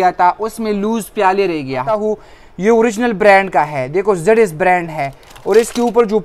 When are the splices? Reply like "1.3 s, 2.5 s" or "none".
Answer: 2.0 s